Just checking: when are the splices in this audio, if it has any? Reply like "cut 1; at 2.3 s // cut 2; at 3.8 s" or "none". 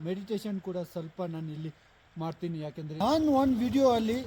cut 1; at 3.0 s